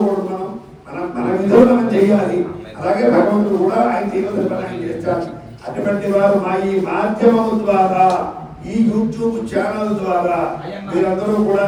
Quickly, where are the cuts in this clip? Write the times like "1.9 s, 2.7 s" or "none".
none